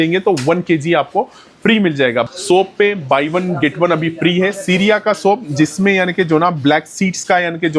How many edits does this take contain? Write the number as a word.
one